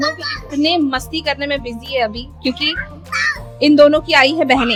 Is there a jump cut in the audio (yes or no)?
no